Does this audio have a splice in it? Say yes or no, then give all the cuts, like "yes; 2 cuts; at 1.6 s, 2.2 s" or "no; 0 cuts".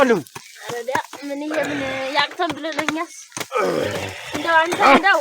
no; 0 cuts